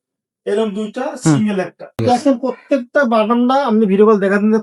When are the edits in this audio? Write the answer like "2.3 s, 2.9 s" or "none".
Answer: 2.0 s